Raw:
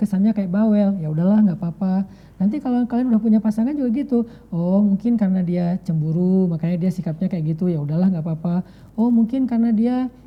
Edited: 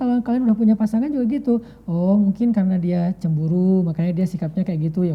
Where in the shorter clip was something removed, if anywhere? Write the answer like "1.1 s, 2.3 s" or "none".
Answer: none